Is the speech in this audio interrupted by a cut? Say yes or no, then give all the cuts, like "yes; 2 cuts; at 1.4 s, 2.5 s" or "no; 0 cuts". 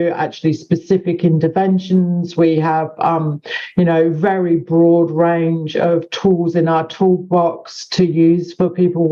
no; 0 cuts